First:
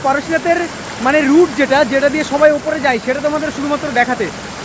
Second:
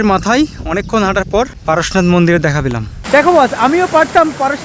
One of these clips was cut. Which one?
second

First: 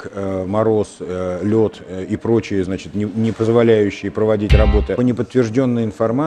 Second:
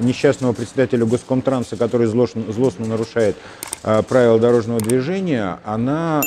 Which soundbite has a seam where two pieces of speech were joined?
first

